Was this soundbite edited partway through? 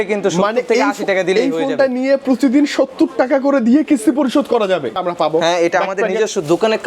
yes; 1 cut; at 5.0 s

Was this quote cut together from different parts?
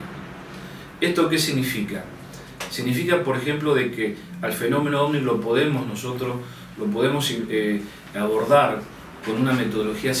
no; 0 cuts

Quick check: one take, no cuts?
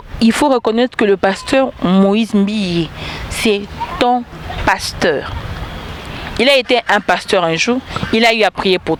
yes; 0 cuts

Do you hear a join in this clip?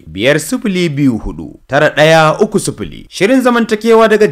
no; 0 cuts

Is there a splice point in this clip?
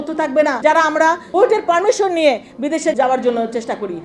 yes; 2 cuts; at 1.0 s, 2.9 s

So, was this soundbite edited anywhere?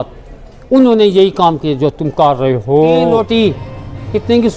yes; 1 cut; at 3.2 s

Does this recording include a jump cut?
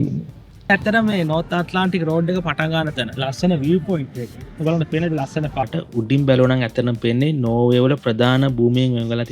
yes; 2 cuts; at 0.7 s, 5.6 s

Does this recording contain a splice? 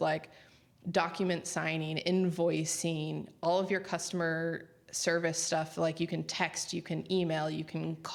no; 0 cuts

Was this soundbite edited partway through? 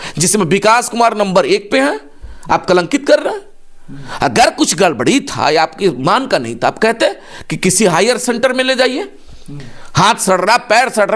no; 0 cuts

